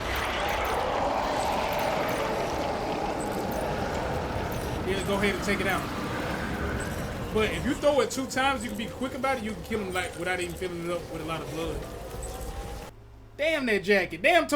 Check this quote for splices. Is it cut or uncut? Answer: cut